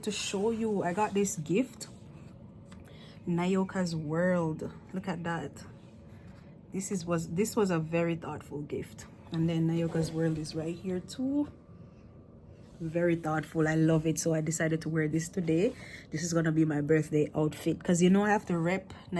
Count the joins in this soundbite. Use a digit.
0